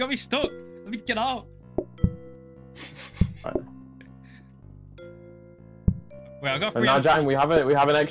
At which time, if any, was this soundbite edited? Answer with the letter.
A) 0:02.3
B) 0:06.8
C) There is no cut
C